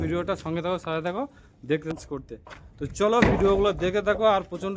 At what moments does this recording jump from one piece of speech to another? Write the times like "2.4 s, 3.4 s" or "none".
1.9 s